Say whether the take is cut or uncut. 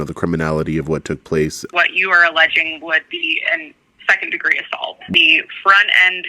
cut